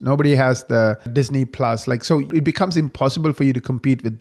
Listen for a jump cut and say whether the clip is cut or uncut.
cut